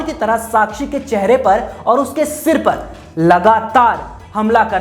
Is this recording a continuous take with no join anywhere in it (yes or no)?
yes